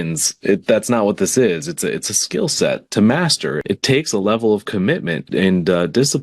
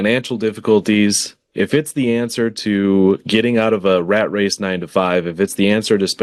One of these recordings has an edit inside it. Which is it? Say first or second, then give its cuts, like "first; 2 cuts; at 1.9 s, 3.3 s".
first; 2 cuts; at 3.6 s, 5.2 s